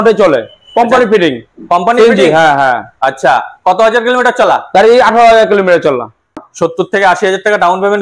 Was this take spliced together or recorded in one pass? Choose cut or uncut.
cut